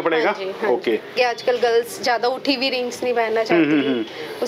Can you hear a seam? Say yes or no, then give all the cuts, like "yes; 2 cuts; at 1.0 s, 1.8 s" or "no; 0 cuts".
yes; 1 cut; at 1.1 s